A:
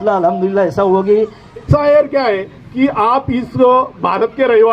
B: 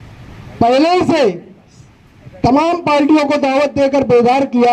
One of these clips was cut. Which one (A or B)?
A